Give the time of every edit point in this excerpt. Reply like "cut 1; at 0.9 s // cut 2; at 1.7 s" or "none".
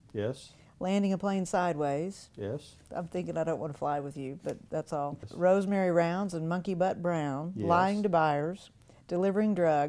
cut 1; at 5.2 s